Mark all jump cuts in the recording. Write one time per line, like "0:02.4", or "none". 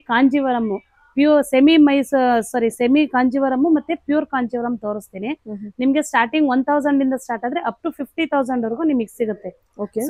none